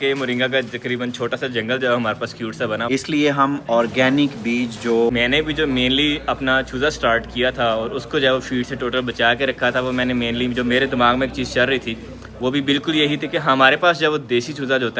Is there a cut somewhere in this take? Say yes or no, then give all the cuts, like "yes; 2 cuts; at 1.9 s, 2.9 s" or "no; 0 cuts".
yes; 2 cuts; at 2.8 s, 5.1 s